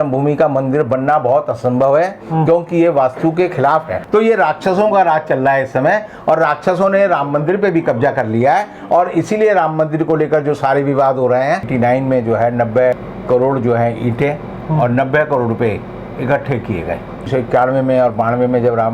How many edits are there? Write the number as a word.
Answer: three